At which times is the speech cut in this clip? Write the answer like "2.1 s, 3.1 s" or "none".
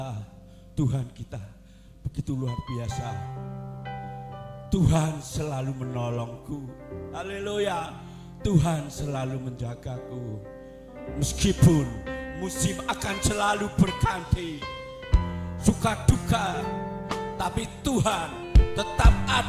none